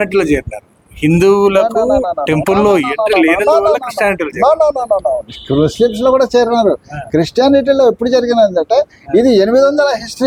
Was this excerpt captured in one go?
yes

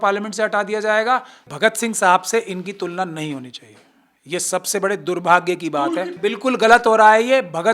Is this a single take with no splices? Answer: no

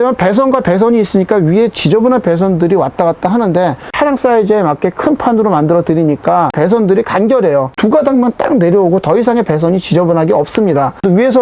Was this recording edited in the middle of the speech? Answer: yes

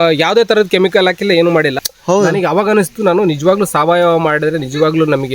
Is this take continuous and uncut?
no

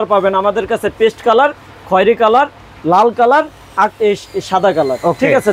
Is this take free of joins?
yes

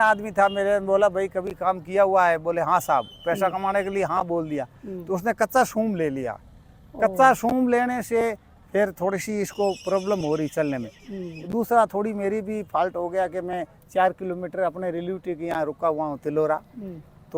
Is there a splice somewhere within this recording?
no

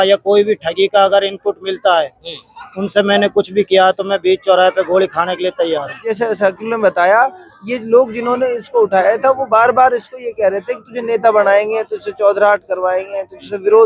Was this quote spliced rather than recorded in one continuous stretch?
yes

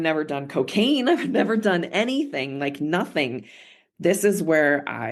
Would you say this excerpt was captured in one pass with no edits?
yes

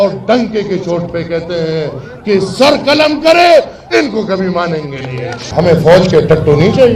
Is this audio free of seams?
no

